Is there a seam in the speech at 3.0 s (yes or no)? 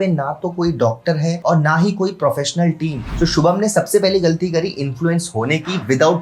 yes